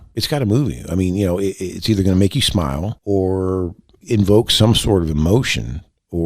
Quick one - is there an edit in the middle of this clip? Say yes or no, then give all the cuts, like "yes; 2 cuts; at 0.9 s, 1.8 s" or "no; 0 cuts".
yes; 1 cut; at 2.9 s